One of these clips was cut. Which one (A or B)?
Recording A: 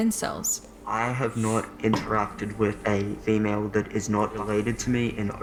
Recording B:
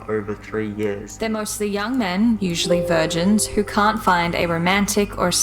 B